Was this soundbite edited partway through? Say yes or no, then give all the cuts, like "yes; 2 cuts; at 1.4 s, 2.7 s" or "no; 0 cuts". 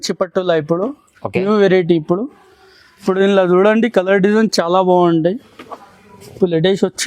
no; 0 cuts